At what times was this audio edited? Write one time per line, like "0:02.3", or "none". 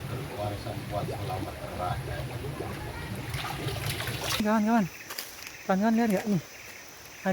0:04.4

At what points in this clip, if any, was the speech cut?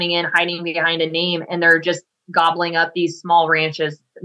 none

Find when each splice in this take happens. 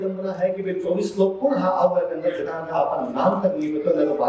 none

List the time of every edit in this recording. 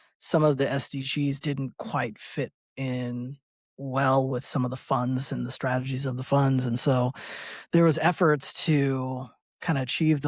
none

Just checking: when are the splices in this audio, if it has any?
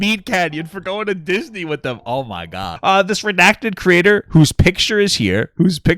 0:02.7

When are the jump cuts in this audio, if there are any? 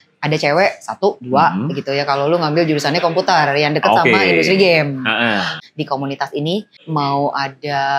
0:05.5
0:06.7

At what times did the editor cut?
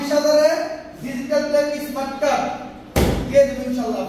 none

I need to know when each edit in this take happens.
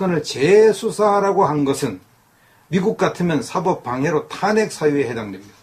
0:04.5

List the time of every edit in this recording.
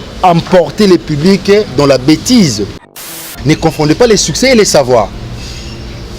0:03.3

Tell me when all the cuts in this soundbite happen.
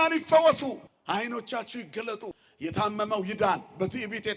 0:00.9
0:02.4

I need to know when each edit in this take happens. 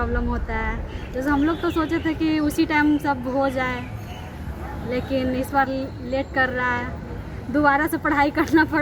none

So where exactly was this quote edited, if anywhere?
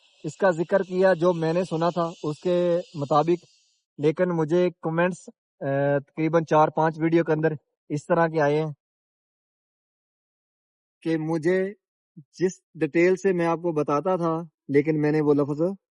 0:14.5

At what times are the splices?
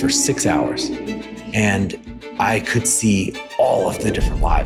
none

